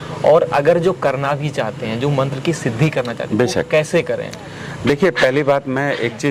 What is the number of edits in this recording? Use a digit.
0